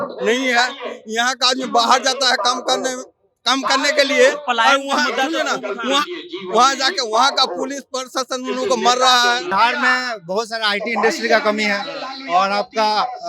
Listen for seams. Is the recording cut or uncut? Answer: cut